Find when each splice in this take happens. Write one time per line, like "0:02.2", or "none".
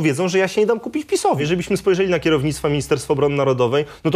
0:01.4